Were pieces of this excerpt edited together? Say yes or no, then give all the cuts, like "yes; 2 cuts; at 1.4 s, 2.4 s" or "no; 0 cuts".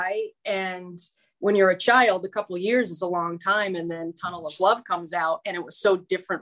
no; 0 cuts